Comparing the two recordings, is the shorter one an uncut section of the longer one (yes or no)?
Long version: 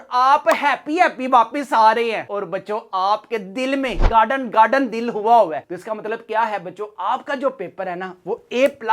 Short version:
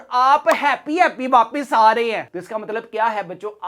no